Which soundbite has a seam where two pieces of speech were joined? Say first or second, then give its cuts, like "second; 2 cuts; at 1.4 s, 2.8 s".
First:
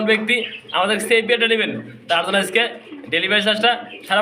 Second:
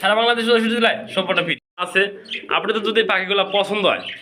second; 1 cut; at 1.8 s